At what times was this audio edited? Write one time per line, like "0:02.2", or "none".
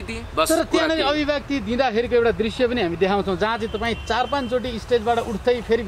none